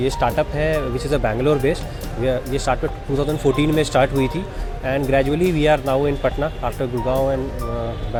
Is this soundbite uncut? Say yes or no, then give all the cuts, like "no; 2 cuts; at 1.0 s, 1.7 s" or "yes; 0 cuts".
yes; 0 cuts